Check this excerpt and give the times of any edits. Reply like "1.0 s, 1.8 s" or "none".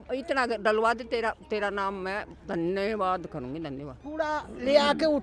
4.0 s